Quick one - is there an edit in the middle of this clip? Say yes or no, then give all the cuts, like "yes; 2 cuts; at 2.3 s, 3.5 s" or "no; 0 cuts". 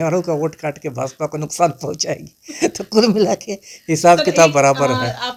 no; 0 cuts